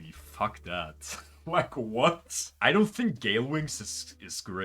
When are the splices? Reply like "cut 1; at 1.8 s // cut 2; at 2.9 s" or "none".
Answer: cut 1; at 2.5 s